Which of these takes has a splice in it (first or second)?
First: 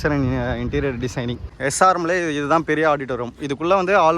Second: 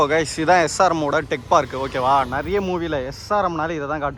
first